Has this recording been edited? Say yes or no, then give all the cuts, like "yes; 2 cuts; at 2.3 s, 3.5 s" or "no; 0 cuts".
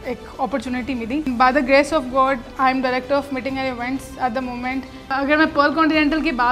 yes; 2 cuts; at 1.3 s, 5.1 s